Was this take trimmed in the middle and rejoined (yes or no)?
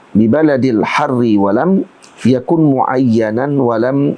no